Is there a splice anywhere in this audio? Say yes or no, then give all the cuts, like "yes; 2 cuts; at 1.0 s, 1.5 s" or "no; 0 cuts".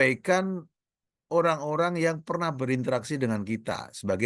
no; 0 cuts